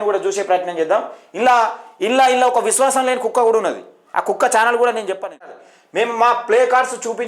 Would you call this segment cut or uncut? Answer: cut